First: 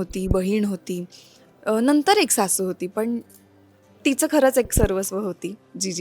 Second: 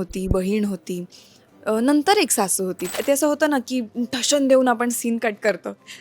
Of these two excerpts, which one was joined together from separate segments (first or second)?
second